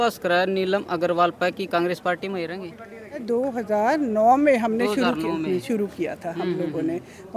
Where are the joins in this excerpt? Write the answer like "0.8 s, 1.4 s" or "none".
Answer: 3.2 s